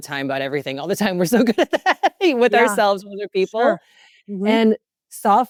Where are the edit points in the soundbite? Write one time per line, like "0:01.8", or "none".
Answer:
none